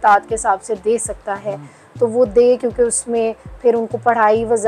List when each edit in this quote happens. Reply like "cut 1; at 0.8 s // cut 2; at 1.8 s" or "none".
none

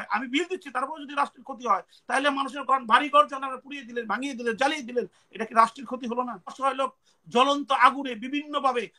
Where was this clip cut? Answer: cut 1; at 6.6 s

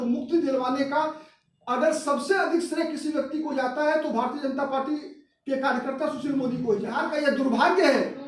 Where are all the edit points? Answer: cut 1; at 7.0 s

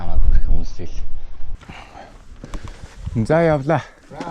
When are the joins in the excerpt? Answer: cut 1; at 1.5 s

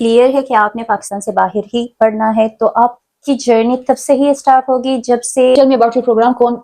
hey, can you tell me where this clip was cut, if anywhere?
cut 1; at 5.5 s

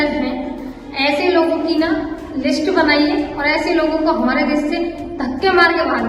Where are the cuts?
none

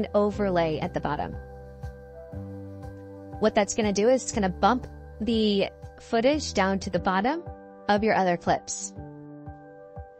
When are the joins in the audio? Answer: cut 1; at 1.3 s // cut 2; at 3.4 s

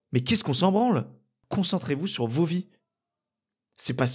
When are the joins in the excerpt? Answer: cut 1; at 1.3 s

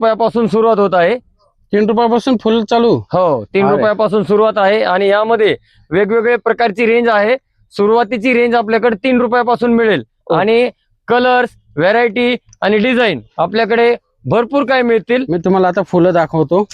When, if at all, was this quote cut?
none

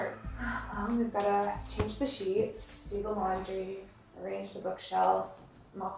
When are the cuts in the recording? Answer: none

